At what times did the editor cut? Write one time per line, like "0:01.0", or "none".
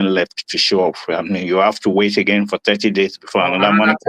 none

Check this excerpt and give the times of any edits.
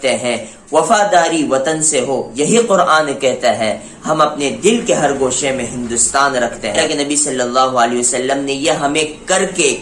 0:06.7

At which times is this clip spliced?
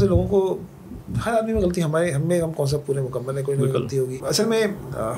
0:04.2

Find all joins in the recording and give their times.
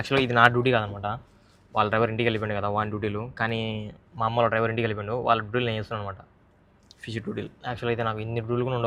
none

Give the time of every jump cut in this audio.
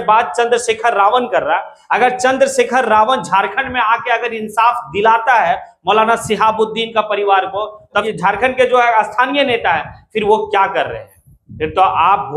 0:08.0

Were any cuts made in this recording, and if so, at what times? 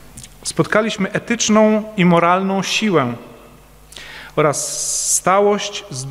0:05.1

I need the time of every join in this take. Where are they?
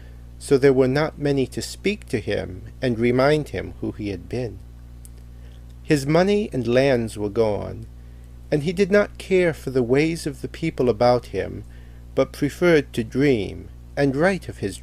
none

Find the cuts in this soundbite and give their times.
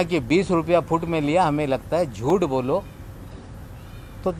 none

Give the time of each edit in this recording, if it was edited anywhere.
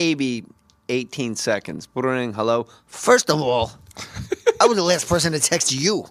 none

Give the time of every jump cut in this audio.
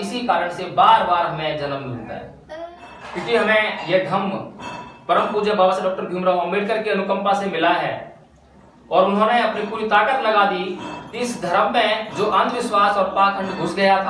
0:02.6

